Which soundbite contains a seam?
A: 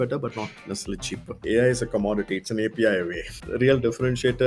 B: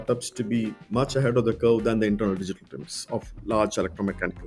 A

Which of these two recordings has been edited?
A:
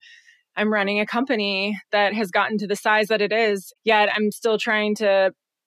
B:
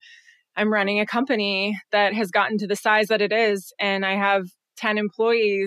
A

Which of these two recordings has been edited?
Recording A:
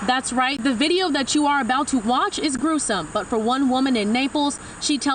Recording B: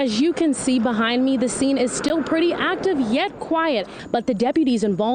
B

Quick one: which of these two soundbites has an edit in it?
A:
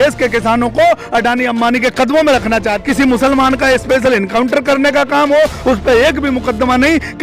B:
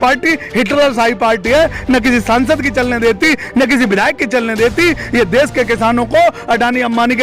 A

